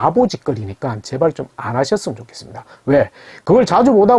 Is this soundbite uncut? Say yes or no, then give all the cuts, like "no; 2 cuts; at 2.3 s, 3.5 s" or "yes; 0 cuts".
yes; 0 cuts